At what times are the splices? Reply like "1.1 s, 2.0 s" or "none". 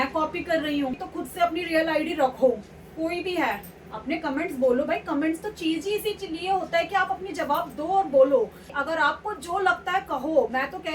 1.0 s, 8.8 s